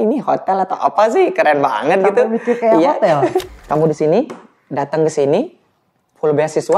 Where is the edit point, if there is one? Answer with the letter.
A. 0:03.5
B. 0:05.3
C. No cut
A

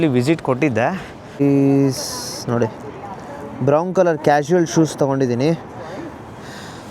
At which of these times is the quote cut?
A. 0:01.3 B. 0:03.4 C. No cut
A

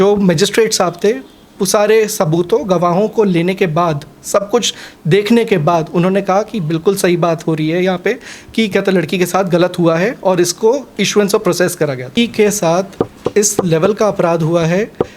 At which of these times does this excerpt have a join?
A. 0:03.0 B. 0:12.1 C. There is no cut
B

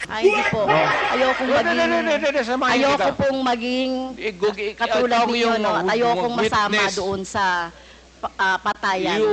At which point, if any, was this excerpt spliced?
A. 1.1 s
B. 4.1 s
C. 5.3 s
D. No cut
A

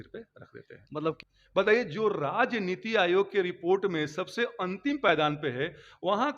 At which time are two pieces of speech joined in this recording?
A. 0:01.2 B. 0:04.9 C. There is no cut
A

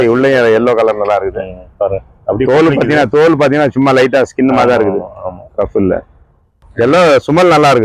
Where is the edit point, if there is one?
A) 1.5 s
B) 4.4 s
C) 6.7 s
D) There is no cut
C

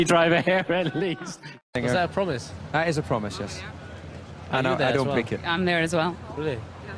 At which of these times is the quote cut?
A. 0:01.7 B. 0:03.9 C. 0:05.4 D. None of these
C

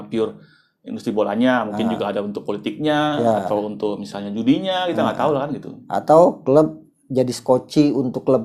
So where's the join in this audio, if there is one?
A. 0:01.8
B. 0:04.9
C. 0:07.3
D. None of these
D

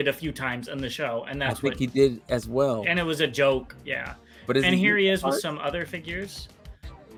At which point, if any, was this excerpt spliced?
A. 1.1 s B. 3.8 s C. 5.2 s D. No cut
D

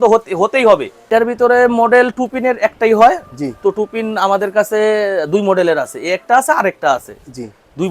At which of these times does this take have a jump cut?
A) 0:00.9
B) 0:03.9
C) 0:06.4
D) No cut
A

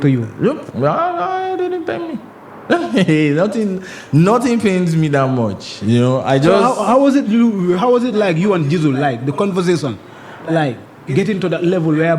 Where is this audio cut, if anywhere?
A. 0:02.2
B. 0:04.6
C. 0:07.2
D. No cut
D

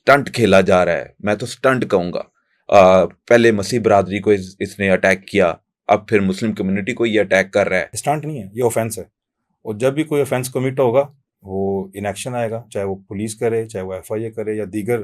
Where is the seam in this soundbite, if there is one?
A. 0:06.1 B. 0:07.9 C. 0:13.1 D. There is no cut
B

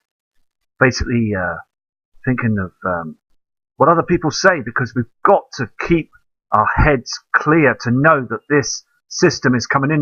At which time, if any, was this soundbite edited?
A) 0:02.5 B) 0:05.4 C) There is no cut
A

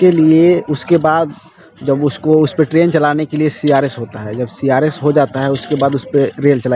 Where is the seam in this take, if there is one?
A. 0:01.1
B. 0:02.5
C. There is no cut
C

